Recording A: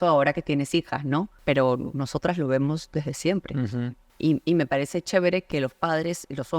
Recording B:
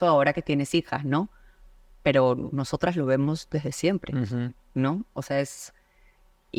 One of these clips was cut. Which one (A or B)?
A